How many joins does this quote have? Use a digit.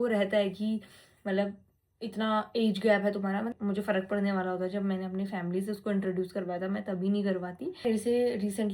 2